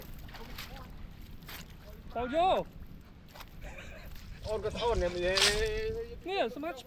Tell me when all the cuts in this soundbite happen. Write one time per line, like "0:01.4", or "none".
none